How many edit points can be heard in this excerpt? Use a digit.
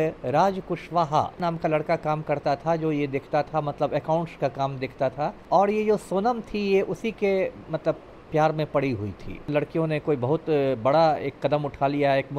3